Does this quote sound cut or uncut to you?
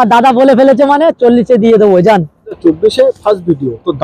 cut